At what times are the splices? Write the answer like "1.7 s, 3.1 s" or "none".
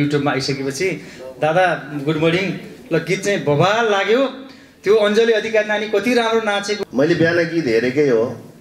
6.8 s